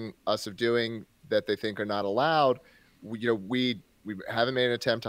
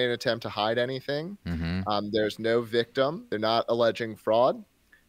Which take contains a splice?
second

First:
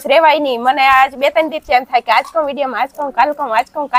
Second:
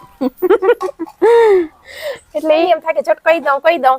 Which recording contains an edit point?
second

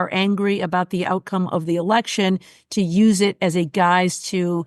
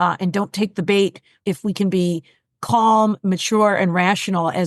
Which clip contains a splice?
second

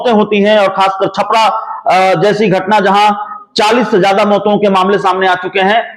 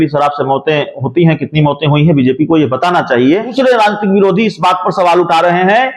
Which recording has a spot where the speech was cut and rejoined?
second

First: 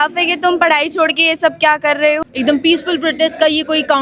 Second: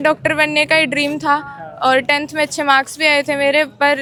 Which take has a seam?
first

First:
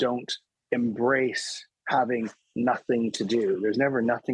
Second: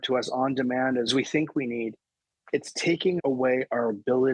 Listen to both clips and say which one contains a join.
second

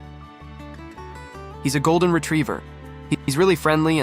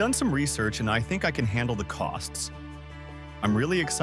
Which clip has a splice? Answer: first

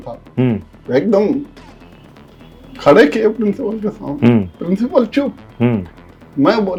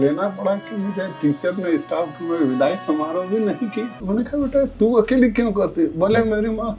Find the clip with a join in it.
second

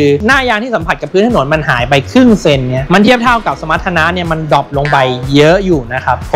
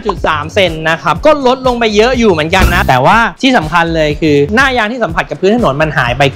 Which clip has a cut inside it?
second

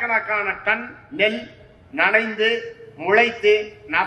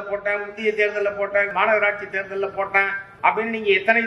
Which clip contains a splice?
second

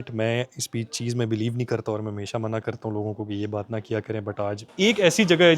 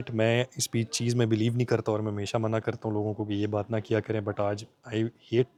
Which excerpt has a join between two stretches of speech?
first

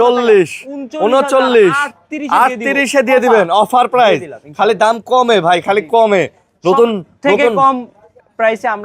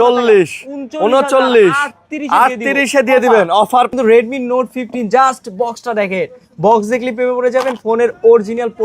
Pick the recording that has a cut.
second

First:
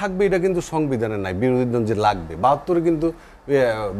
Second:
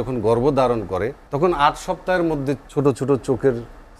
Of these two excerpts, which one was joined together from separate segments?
second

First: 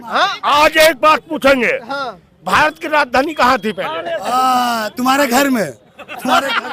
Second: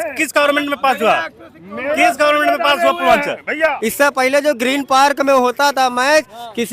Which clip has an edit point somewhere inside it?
second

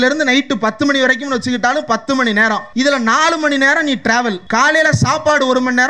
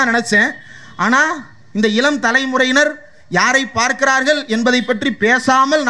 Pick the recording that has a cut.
first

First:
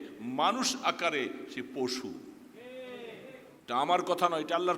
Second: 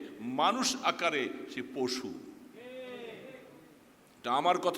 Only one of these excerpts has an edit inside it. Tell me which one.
first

